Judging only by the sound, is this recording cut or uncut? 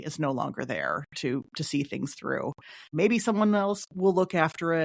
uncut